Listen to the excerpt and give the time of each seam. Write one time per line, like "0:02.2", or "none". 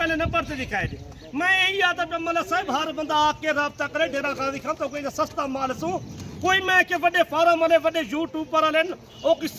none

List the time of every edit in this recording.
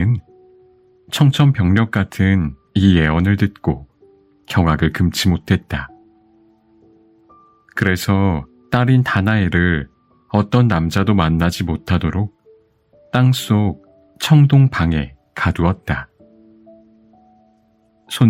none

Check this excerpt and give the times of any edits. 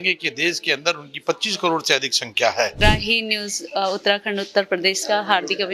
0:02.8

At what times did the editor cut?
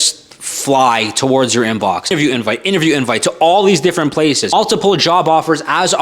0:02.1
0:04.5

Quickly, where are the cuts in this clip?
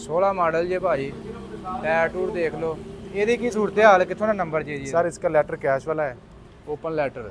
none

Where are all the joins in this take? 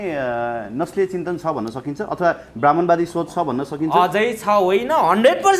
none

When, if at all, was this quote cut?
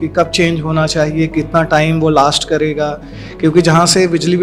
none

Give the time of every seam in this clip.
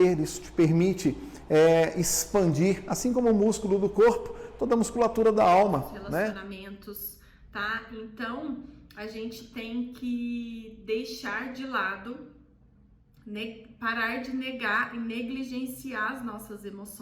0:06.4

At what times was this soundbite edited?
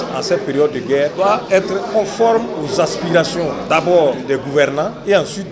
0:01.6
0:02.6
0:04.2

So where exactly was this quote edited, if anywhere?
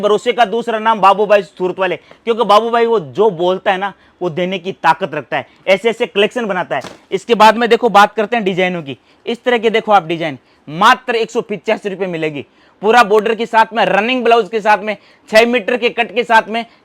none

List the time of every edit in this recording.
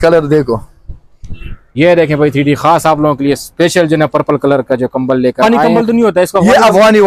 0:05.4

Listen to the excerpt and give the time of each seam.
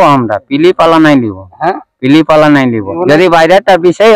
0:02.9

